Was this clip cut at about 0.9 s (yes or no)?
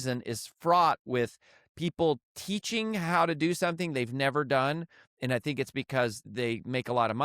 no